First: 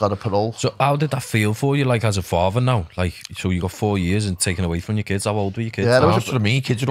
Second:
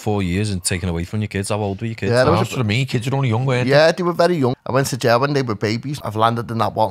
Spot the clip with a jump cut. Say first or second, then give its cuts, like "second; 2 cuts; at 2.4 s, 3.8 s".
second; 2 cuts; at 4.6 s, 5.9 s